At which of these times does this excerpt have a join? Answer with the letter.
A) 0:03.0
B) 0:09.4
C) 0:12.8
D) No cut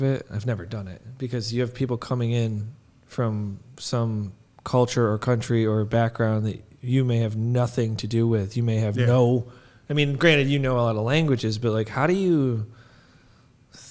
D